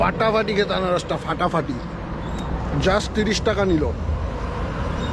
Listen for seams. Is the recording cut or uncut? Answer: uncut